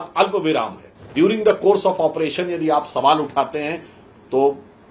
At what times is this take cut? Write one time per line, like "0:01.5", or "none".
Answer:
0:01.1